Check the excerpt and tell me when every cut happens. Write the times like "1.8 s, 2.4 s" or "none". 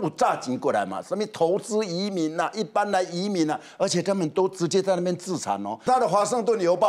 5.9 s